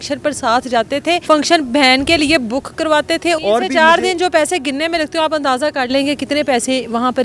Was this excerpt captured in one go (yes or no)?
no